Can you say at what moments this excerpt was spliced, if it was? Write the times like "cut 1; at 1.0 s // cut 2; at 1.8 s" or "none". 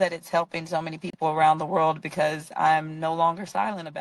none